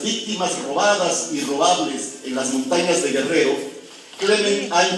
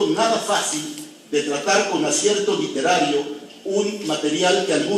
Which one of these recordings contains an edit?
second; 1 cut; at 1.8 s

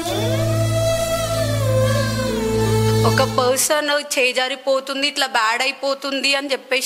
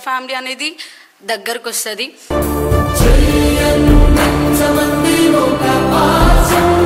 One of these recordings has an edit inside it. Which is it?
first; 1 cut; at 3.1 s

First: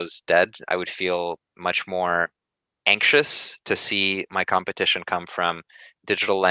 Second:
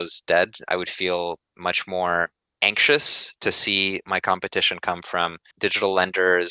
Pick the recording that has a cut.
second; 2 cuts; at 2.4 s, 5.4 s

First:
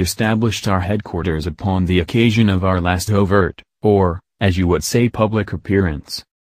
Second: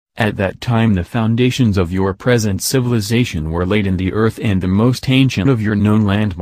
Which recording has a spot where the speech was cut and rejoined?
first; 1 cut; at 4.9 s

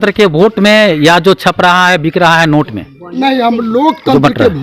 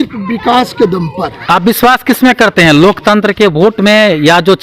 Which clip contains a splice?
second; 1 cut; at 1.4 s

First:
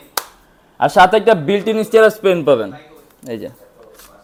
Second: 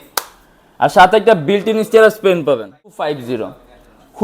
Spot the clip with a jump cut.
second; 1 cut; at 2.9 s

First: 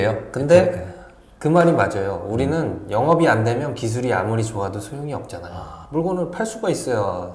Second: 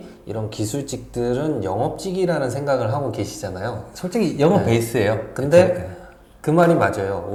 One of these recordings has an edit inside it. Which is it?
first; 1 cut; at 5.7 s

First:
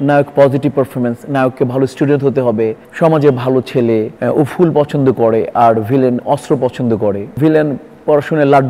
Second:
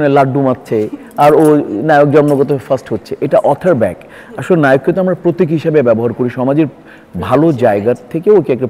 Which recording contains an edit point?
first; 3 cuts; at 2.8 s, 4.1 s, 7.3 s

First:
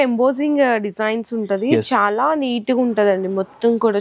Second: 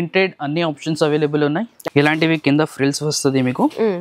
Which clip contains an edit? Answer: second; 1 cut; at 1.8 s

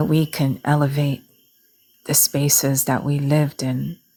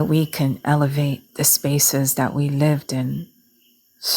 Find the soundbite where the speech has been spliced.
second; 1 cut; at 1.3 s

